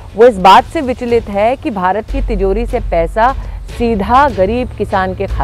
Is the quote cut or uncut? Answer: uncut